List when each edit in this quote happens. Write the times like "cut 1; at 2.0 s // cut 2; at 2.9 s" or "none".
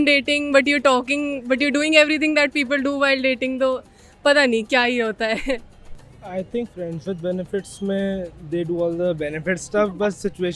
none